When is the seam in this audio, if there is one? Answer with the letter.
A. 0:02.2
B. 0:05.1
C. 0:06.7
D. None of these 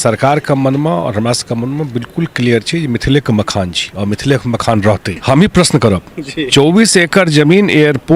B